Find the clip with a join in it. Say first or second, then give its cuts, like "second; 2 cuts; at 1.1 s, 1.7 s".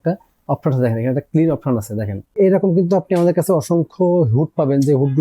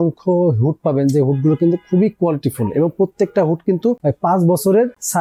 first; 1 cut; at 2.3 s